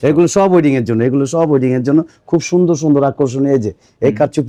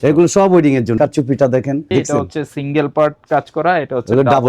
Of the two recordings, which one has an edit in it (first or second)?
second